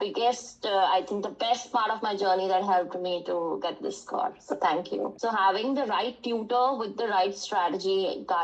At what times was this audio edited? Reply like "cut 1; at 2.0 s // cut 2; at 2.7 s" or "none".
cut 1; at 5.2 s